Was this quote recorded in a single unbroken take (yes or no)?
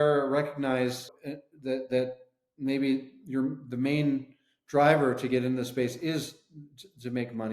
no